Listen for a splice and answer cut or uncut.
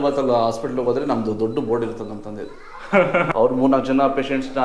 cut